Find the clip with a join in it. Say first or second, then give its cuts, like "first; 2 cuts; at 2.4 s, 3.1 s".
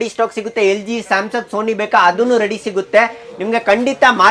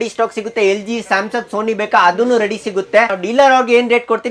second; 1 cut; at 3.2 s